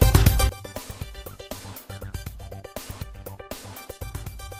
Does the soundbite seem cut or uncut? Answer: uncut